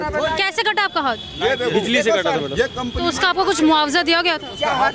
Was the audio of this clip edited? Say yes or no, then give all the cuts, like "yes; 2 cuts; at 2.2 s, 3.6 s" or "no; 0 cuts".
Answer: no; 0 cuts